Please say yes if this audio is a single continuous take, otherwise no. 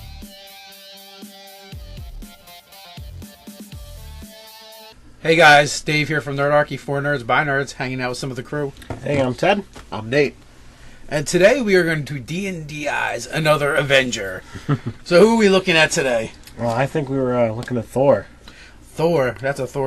yes